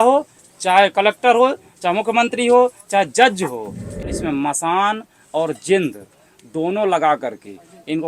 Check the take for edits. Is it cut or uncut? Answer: cut